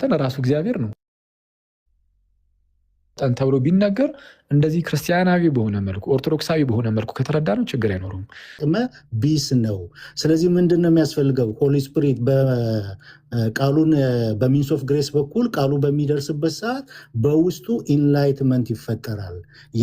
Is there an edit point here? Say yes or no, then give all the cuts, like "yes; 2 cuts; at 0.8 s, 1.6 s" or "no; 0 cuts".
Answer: yes; 1 cut; at 8.6 s